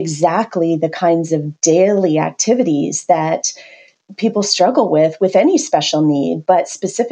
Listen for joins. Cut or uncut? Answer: uncut